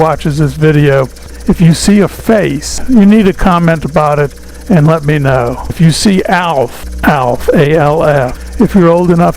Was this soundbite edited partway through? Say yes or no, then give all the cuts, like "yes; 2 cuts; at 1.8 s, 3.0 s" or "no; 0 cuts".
yes; 5 cuts; at 1.2 s, 2.8 s, 5.7 s, 6.8 s, 8.4 s